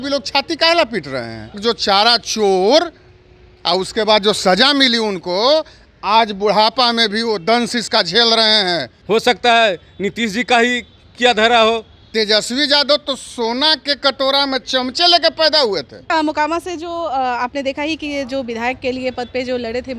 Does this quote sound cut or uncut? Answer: cut